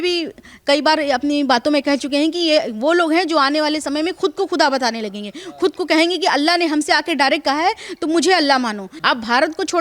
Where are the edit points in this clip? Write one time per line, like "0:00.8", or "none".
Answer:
0:08.9